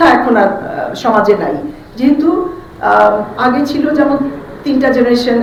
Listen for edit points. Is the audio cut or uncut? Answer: uncut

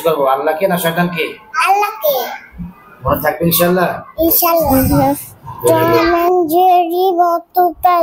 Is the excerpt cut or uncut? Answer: cut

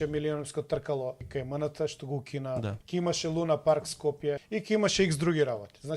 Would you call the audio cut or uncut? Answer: cut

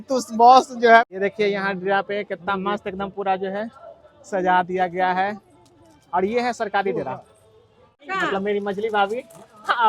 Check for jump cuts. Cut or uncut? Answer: cut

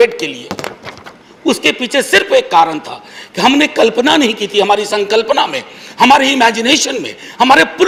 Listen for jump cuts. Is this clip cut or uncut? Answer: uncut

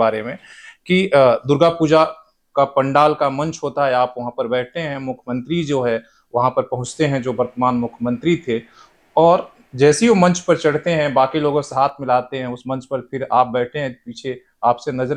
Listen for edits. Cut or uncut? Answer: uncut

